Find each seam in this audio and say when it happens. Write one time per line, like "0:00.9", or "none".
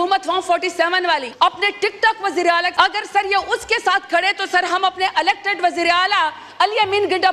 0:01.3
0:02.7